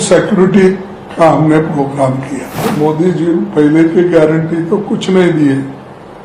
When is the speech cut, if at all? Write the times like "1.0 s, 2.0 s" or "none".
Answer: 2.6 s